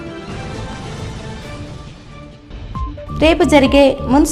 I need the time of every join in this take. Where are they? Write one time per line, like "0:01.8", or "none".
0:00.7
0:02.9